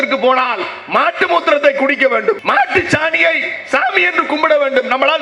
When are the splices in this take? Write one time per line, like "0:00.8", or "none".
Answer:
0:02.4